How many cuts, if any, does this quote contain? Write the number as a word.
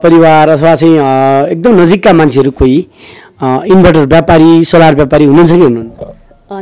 zero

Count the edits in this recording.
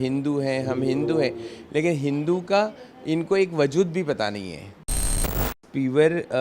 one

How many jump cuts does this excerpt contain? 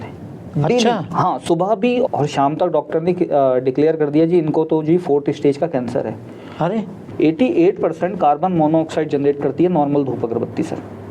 two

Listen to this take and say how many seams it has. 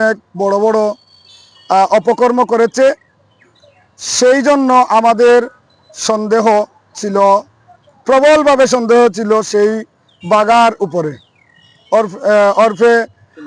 zero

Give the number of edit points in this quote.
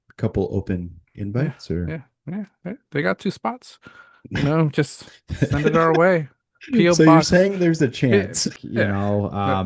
one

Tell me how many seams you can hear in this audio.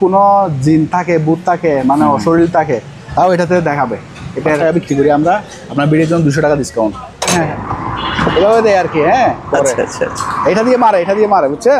two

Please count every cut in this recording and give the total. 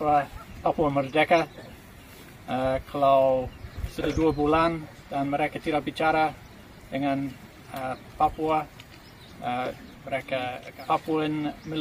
one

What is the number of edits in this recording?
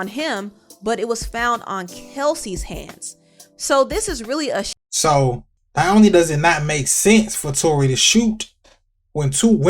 two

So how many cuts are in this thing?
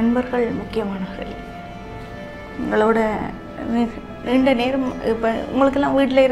zero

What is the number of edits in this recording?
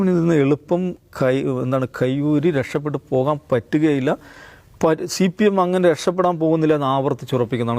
zero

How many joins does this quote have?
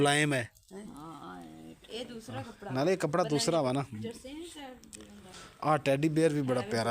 one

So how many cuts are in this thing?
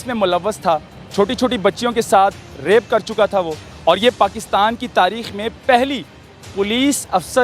two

